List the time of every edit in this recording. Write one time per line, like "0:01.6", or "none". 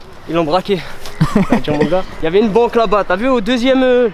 0:02.1